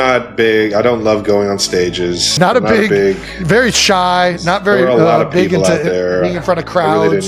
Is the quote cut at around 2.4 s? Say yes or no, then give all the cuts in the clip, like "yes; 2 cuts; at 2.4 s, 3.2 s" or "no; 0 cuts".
yes; 1 cut; at 2.4 s